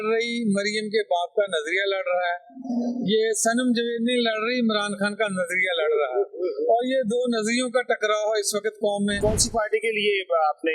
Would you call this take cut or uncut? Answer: cut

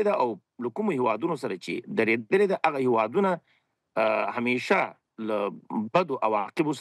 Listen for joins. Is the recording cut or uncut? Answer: uncut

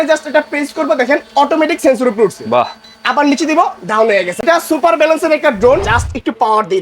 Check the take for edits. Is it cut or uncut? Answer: cut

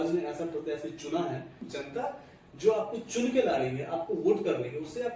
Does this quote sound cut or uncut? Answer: cut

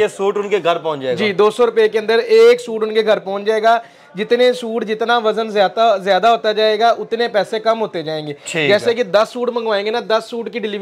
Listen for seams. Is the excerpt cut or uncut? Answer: uncut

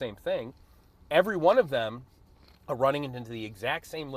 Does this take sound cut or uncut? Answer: uncut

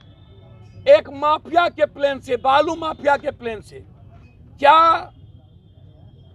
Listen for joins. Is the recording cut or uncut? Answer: uncut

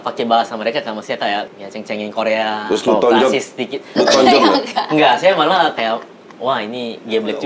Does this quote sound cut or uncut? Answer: cut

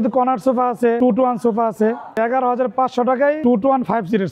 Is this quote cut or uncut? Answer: cut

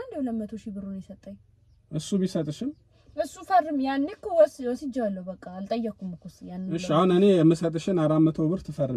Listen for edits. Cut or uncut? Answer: uncut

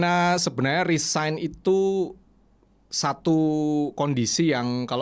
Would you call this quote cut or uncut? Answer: uncut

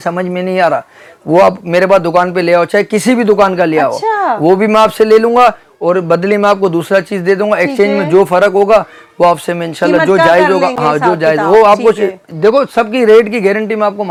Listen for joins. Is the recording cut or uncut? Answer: uncut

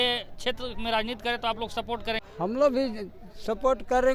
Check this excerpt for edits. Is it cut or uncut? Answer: cut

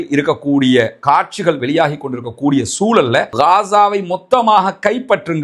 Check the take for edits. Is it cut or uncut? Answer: cut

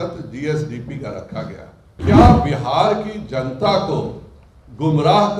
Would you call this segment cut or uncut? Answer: cut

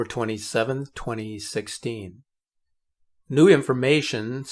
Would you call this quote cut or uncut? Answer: uncut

